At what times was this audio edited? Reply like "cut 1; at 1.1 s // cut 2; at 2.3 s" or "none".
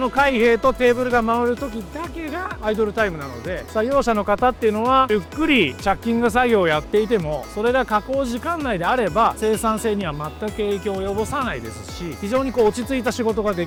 none